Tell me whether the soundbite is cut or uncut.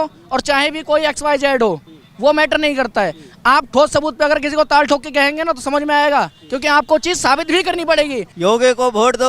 cut